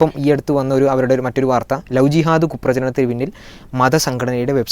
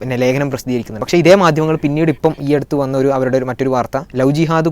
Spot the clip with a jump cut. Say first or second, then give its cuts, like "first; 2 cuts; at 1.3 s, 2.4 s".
second; 1 cut; at 1.0 s